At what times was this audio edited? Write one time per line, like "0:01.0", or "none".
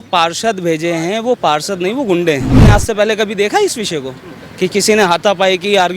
0:02.6